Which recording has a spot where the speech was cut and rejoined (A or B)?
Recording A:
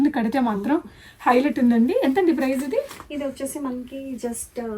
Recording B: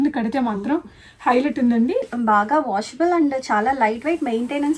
B